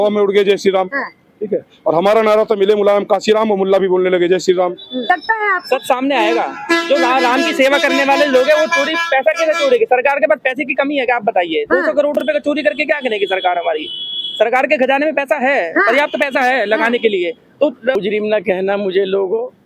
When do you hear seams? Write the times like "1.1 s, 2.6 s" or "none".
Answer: 5.1 s, 17.9 s